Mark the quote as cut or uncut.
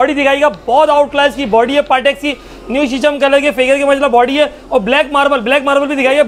uncut